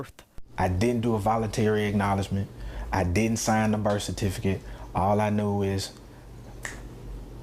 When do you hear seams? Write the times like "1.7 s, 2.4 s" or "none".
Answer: 2.3 s